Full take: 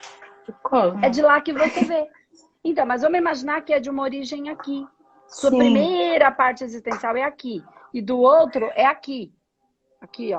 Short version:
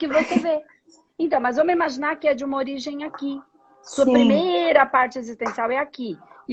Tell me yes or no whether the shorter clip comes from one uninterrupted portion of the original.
yes